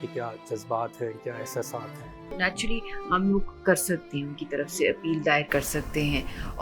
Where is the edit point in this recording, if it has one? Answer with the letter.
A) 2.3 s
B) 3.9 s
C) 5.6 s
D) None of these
A